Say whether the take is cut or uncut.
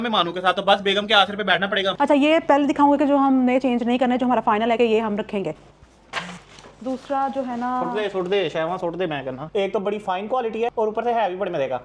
cut